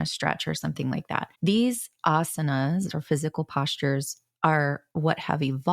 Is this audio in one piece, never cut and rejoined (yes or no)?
no